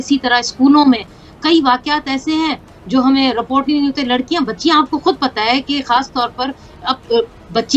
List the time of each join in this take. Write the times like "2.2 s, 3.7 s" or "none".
none